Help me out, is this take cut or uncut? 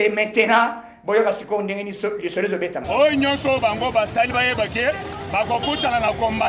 cut